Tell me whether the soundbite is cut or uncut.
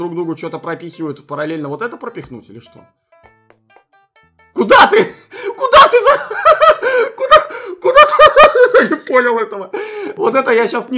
uncut